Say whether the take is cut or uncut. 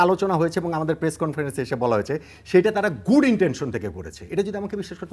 uncut